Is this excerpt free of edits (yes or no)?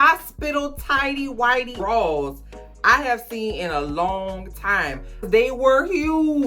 no